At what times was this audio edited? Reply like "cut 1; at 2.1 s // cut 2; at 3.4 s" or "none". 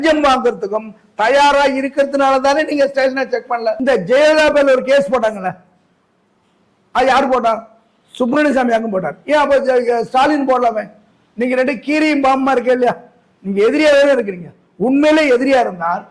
cut 1; at 3.8 s